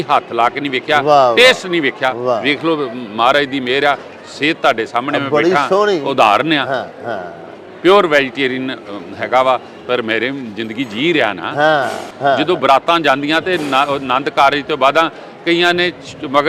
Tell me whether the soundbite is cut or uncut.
cut